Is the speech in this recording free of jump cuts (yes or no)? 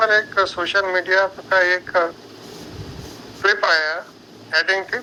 yes